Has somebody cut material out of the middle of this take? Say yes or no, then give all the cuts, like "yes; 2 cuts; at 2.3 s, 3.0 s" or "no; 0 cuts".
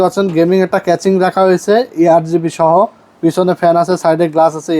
no; 0 cuts